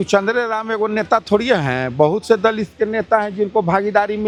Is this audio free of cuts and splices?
yes; 0 cuts

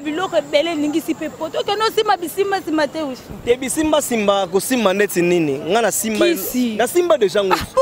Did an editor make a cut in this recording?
no; 0 cuts

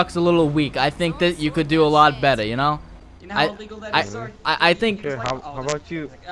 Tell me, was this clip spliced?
no; 0 cuts

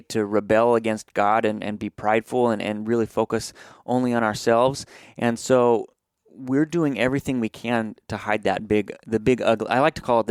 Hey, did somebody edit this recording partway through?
no; 0 cuts

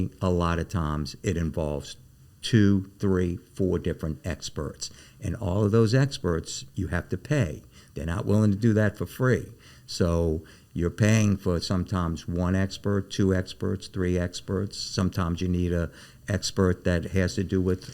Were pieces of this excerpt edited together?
no; 0 cuts

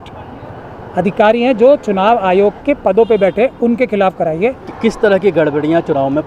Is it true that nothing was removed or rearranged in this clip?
no; 1 cut; at 4.7 s

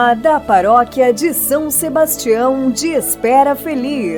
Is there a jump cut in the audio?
no; 0 cuts

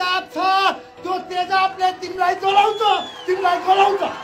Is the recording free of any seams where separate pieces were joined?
yes; 0 cuts

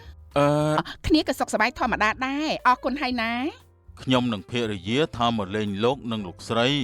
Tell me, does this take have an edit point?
yes; 1 cut; at 0.9 s

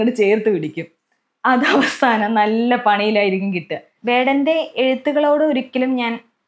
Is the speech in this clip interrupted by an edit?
yes; 1 cut; at 3.9 s

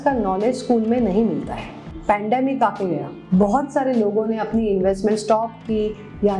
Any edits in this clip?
yes; 2 cuts; at 1.9 s, 3.1 s

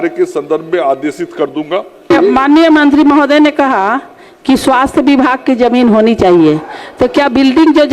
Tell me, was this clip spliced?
yes; 1 cut; at 2.1 s

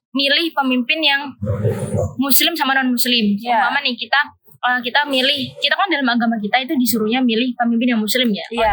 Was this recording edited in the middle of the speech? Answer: no; 0 cuts

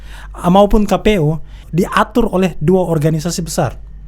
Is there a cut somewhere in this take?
yes; 1 cut; at 1.6 s

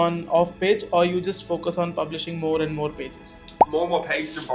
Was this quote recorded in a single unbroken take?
yes; 0 cuts

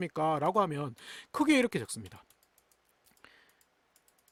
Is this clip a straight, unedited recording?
yes; 0 cuts

